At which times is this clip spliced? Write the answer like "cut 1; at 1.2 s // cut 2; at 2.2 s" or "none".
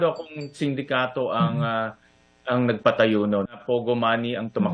cut 1; at 3.6 s